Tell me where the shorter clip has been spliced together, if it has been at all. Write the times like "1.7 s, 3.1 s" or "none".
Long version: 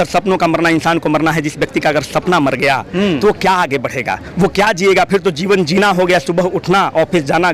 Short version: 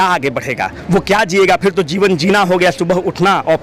none